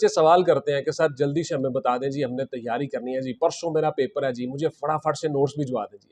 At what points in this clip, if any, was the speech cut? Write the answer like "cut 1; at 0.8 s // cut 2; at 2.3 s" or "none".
none